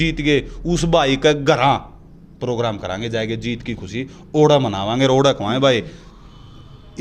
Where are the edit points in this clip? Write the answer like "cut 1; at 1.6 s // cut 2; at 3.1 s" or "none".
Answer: none